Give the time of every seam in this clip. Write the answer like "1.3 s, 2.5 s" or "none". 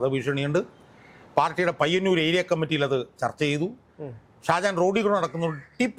none